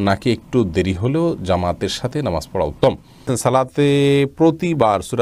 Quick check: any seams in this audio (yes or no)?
yes